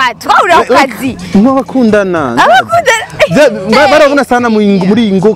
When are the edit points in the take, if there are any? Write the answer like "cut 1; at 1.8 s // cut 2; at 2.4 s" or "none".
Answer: none